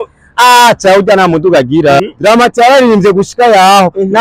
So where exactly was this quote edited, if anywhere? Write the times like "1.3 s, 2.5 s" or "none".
2.0 s